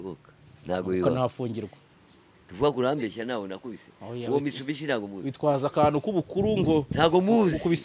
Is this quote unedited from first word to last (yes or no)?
no